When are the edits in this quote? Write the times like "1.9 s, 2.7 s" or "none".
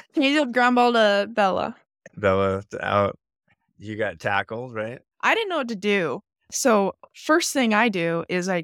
5.0 s